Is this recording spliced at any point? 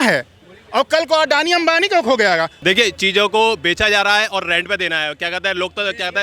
yes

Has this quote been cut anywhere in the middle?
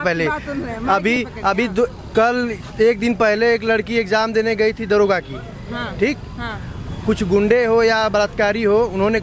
no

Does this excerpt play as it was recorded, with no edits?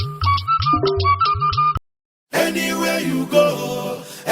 no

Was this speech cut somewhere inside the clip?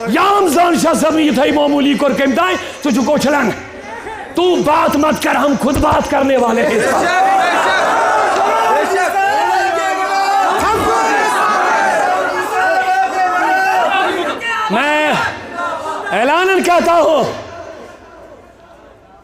yes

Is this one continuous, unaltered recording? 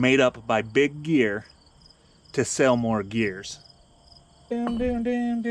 no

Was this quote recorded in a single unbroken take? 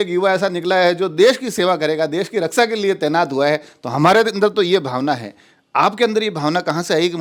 yes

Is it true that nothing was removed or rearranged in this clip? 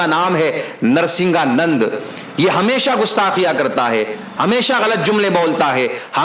yes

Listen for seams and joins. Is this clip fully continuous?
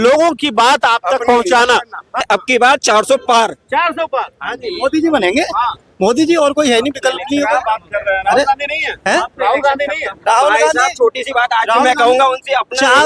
no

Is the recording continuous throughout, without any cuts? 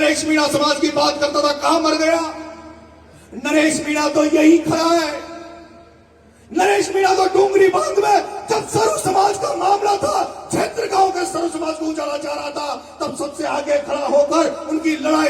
yes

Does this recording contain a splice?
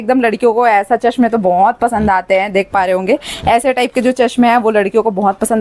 no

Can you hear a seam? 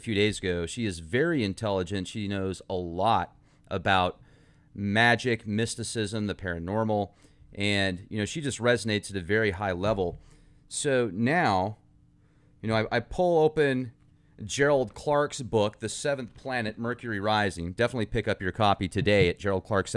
no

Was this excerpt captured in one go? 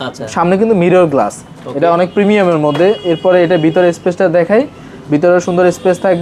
yes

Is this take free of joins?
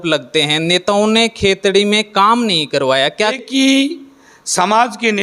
no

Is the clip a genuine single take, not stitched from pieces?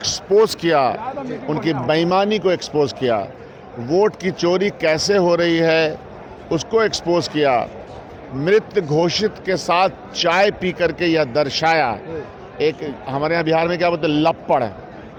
yes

